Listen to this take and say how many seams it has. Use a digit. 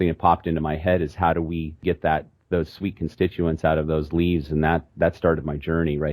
1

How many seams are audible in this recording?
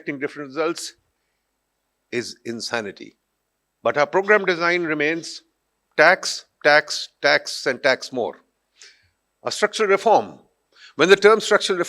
0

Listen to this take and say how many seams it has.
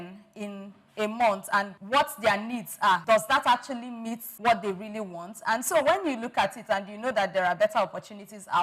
3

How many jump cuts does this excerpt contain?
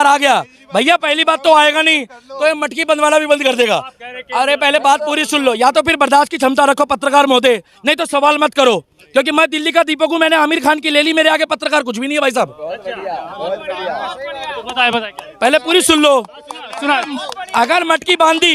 0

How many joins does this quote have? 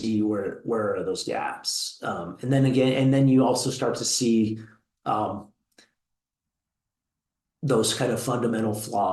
0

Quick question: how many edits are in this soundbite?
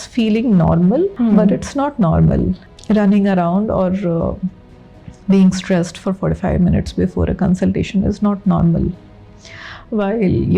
2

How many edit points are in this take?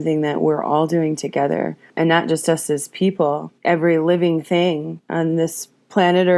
3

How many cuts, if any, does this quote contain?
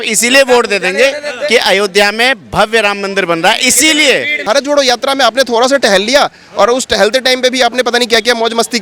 1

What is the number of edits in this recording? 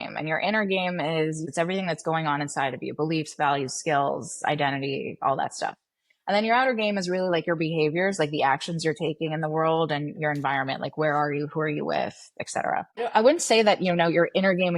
2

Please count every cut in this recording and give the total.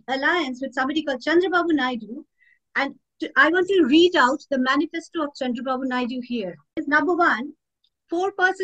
1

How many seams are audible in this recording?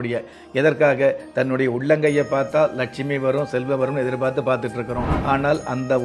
1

